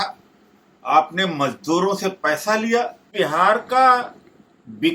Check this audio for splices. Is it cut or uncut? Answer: cut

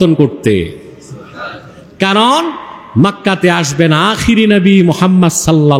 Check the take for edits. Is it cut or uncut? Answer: uncut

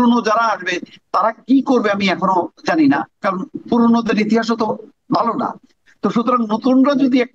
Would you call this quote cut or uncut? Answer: uncut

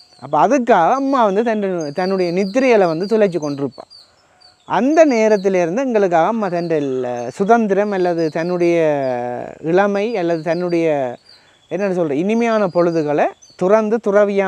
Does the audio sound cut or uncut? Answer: uncut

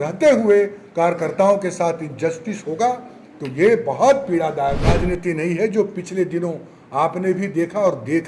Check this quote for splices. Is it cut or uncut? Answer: cut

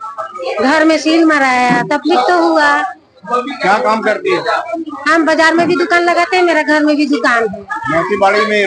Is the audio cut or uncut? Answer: uncut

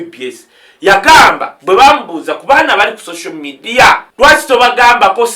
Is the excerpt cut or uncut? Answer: cut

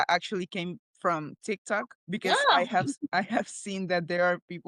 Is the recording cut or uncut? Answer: uncut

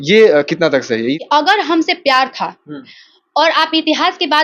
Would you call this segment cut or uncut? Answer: cut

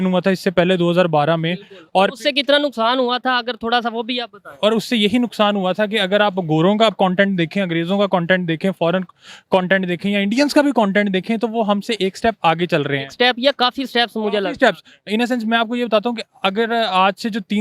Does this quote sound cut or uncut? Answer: uncut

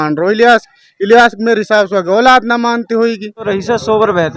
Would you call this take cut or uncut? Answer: cut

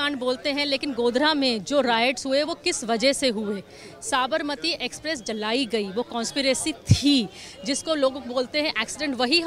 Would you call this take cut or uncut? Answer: uncut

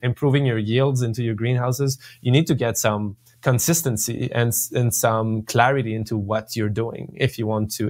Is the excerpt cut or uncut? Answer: uncut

